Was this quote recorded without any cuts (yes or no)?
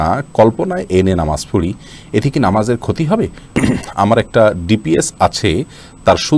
no